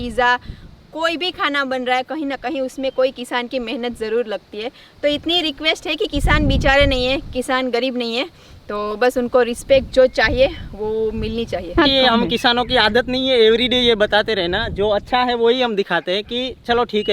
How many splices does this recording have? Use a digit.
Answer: 1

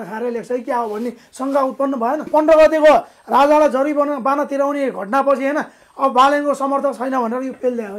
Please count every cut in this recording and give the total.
1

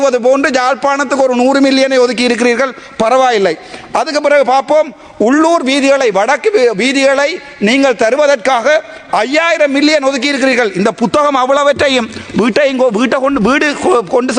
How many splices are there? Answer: 0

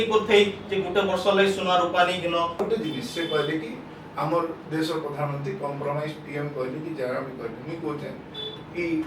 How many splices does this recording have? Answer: 1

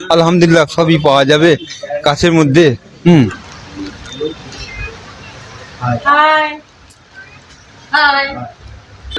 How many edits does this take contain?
1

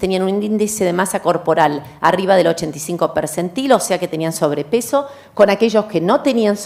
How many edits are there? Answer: 1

